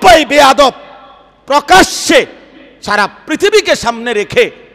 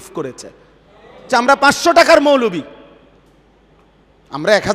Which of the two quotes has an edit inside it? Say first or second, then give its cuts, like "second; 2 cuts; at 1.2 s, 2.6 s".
second; 1 cut; at 1.3 s